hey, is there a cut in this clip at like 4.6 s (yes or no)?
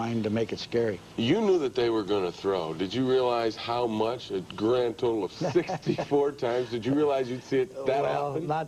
yes